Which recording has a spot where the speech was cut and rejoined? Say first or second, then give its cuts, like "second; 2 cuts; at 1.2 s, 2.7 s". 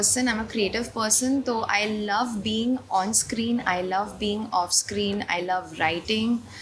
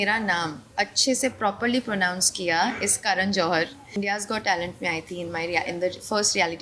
second; 1 cut; at 3.9 s